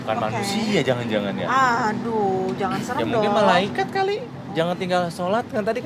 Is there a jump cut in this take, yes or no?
no